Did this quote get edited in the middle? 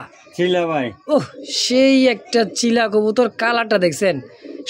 no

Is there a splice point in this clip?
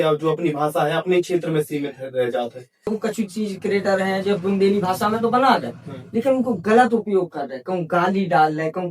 yes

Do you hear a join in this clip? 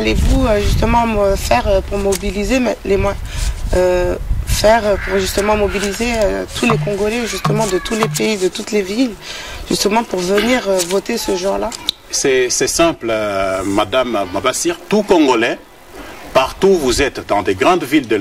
yes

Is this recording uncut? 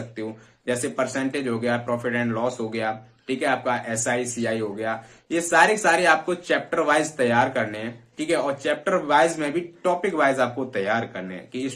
yes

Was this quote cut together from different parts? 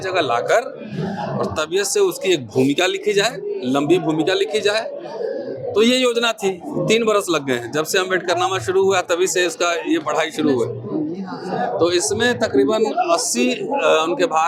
no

